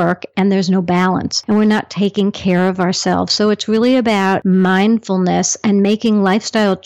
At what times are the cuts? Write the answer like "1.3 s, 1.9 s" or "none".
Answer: 1.3 s, 4.4 s

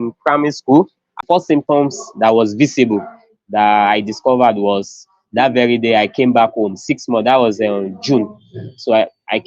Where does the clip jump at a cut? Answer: 1.2 s

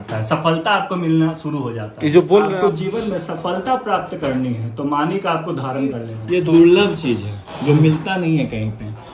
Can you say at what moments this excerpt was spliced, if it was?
2.5 s, 6.1 s

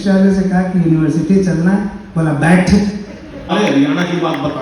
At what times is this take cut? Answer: 3.5 s

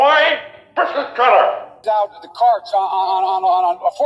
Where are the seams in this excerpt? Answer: 1.8 s

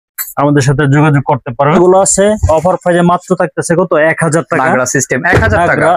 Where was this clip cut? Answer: 1.8 s

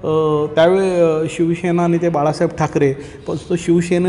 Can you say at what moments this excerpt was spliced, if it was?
none

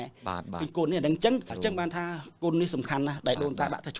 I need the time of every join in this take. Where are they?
1.5 s

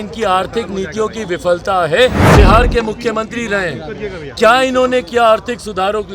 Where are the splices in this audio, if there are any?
2.2 s

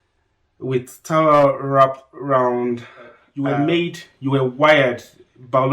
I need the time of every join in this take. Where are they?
3.2 s

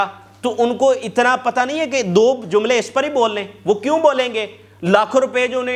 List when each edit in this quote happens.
none

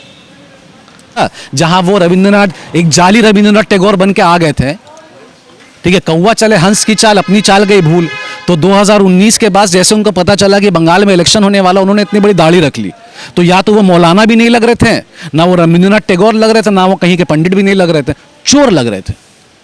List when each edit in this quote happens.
1.2 s

